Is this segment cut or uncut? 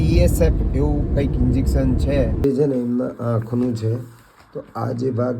cut